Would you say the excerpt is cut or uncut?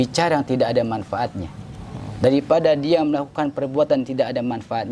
uncut